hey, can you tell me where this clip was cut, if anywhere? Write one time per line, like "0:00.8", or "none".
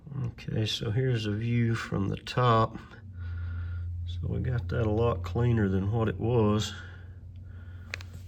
none

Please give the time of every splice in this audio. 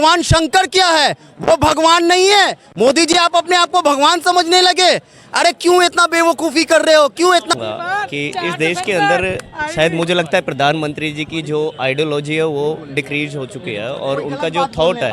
0:07.5

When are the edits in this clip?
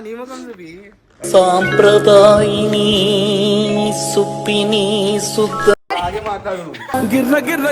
0:01.2
0:05.9

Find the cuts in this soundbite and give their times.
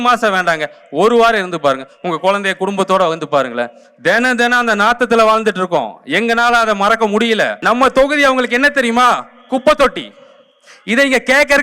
0:07.6

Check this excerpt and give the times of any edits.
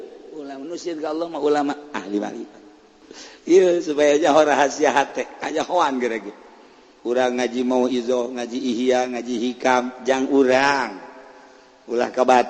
0:03.0

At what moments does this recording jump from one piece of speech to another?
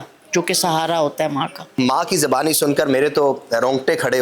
0:01.6

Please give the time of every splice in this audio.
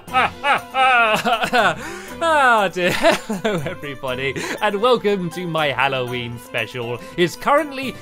0:03.0

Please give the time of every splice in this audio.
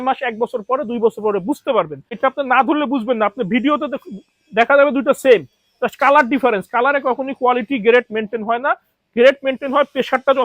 0:02.2

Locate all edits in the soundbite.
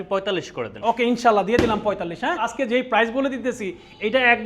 0:02.5

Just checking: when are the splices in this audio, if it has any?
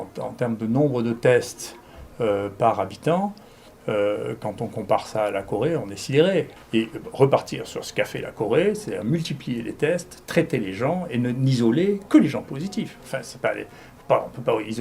0:06.6

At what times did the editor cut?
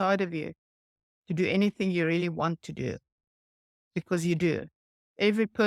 none

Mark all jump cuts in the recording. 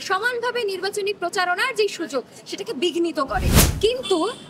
0:03.6

